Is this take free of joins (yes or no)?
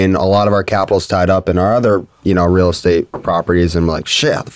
yes